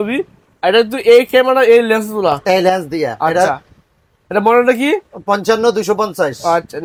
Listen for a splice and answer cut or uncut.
uncut